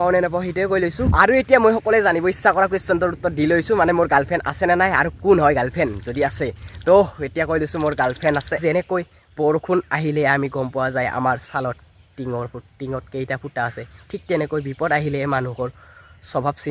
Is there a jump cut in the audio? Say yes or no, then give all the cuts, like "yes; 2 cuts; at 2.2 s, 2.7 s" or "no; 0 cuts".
yes; 2 cuts; at 1.0 s, 8.6 s